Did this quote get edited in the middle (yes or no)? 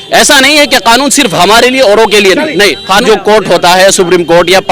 yes